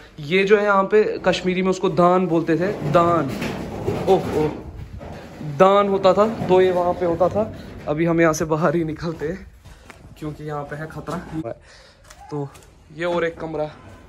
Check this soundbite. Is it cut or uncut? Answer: uncut